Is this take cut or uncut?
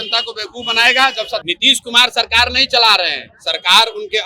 cut